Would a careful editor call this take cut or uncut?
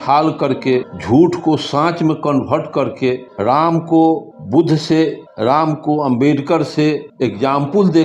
cut